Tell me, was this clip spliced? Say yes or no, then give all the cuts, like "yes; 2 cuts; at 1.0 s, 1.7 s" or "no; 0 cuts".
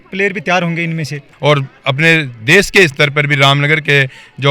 yes; 1 cut; at 1.3 s